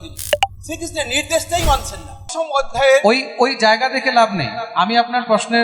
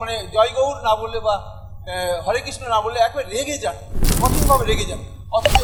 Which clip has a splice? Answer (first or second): first